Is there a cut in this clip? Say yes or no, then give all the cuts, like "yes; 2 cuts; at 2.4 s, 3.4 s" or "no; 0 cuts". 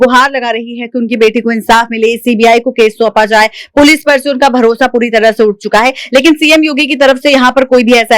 no; 0 cuts